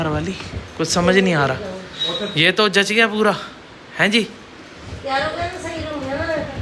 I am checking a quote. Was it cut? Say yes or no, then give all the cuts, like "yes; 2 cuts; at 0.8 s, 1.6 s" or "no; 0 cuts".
no; 0 cuts